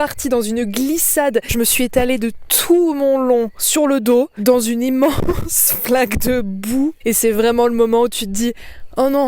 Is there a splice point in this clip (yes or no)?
yes